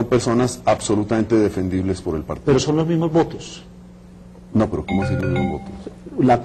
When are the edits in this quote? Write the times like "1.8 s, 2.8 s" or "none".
1.7 s